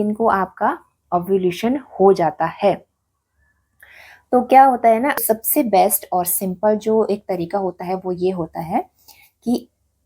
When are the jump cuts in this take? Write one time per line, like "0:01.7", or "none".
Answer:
0:05.2